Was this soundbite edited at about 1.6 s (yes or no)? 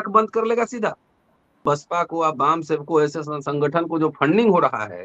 yes